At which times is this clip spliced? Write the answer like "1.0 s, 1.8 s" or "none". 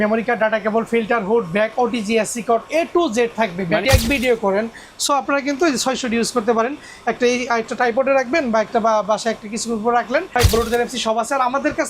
3.8 s, 10.3 s